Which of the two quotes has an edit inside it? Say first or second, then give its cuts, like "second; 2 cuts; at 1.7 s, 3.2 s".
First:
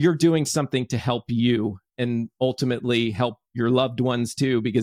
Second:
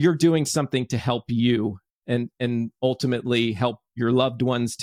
first; 1 cut; at 1.9 s